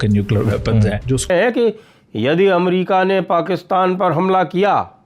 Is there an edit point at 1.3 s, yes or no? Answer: yes